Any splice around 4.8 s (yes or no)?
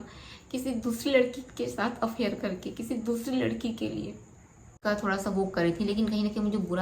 yes